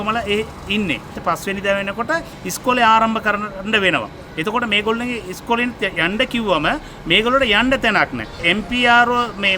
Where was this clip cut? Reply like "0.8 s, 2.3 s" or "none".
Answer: 1.2 s, 8.4 s

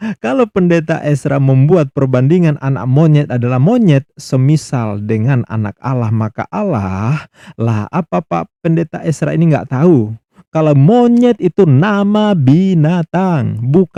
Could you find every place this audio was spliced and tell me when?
none

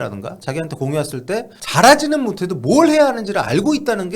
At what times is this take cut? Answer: 1.6 s

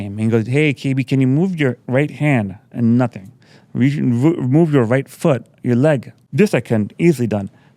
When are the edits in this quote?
6.2 s

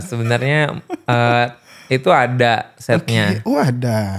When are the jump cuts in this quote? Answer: none

